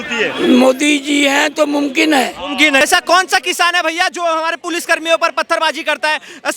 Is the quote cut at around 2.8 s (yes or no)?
yes